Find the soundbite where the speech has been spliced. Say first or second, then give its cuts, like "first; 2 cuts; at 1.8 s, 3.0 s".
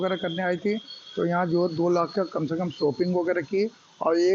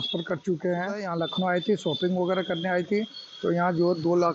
second; 1 cut; at 1.0 s